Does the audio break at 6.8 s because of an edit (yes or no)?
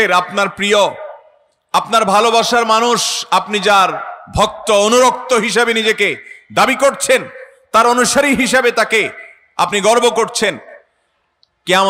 no